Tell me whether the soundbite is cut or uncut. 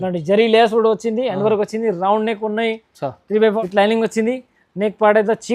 cut